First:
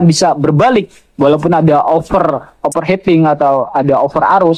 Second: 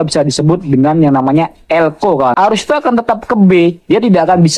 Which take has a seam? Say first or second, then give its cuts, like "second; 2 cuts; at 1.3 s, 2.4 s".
second; 1 cut; at 2.3 s